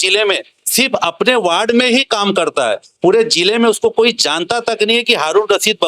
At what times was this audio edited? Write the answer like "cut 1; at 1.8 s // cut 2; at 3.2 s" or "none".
none